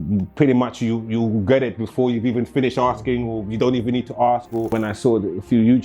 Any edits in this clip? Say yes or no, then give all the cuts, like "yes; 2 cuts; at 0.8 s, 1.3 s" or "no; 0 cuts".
yes; 1 cut; at 4.7 s